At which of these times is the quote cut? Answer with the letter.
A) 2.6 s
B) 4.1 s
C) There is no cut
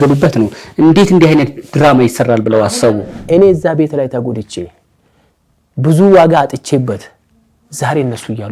A